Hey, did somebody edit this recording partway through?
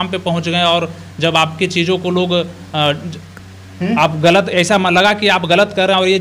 no; 0 cuts

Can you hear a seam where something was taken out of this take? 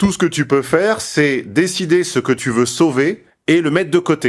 yes; 2 cuts; at 2.4 s, 3.3 s

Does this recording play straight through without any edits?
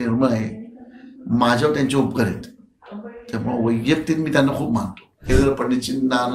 no; 1 cut; at 5.3 s

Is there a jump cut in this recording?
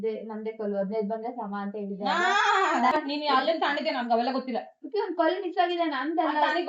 yes; 1 cut; at 2.9 s

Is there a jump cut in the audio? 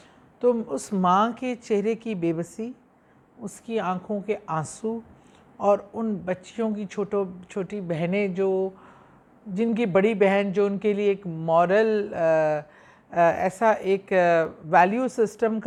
no; 0 cuts

